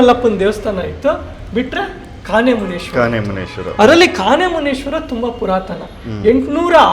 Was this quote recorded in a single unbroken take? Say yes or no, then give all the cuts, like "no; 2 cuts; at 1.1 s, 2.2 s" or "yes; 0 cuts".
yes; 0 cuts